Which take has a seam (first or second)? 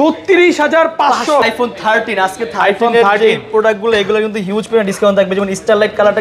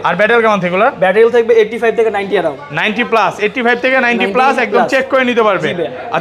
first